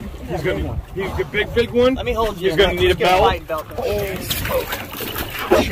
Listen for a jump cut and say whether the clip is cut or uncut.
cut